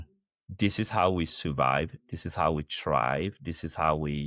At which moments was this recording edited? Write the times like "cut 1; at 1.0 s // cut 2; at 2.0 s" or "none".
none